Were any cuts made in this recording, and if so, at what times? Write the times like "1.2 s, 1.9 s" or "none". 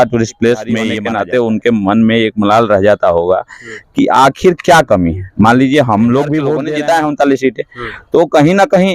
0.9 s, 6.5 s